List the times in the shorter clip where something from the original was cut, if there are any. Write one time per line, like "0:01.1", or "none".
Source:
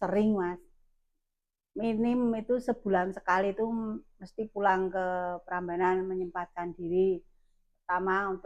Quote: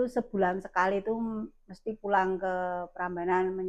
none